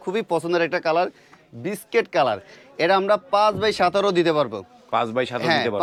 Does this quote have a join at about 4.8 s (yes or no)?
no